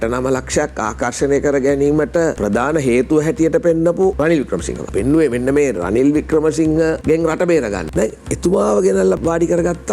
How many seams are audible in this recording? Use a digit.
5